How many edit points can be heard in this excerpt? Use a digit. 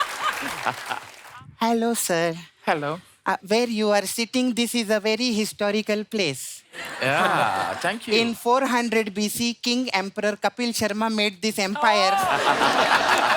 1